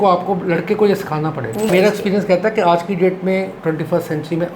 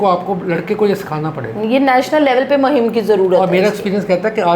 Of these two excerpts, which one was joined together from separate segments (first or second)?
first